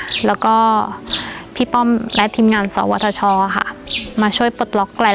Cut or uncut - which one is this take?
uncut